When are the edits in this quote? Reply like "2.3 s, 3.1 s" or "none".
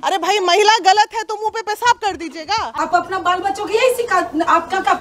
2.7 s